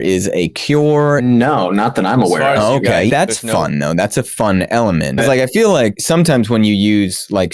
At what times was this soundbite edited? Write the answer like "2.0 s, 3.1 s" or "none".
1.2 s, 3.1 s, 5.2 s, 6.0 s

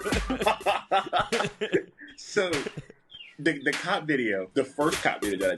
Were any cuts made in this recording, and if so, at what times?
4.5 s

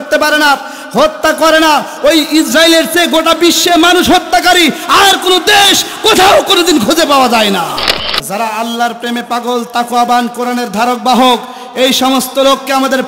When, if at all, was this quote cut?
8.0 s

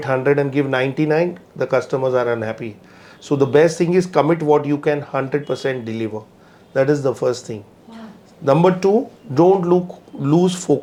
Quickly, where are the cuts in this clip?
none

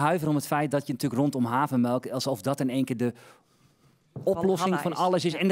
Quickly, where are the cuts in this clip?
none

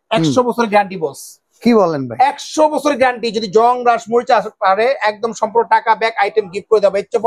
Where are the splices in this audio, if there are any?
none

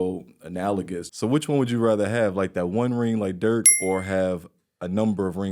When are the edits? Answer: 1.0 s

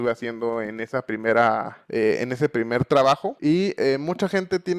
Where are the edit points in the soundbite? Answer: 1.8 s, 3.3 s

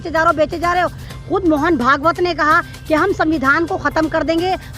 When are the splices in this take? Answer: 1.1 s

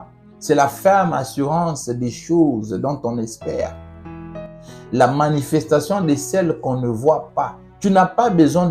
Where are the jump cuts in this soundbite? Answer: 7.6 s

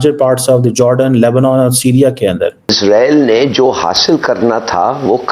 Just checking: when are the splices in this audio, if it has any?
2.8 s

